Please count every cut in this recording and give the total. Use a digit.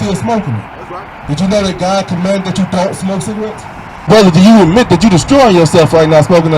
1